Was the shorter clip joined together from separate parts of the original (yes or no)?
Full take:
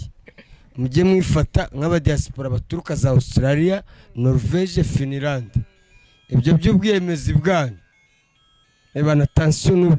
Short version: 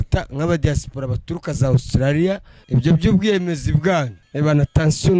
yes